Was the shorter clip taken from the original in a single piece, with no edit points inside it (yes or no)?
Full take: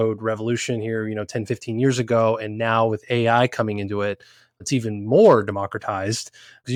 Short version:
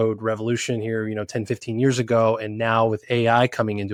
yes